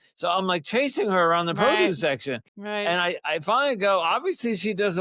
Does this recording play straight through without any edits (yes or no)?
yes